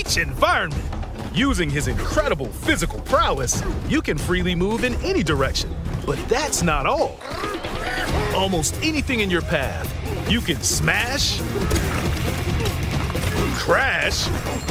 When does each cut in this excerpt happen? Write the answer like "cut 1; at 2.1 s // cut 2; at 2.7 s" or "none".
none